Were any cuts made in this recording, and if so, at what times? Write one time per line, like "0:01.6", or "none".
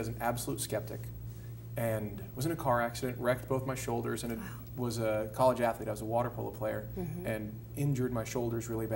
0:05.3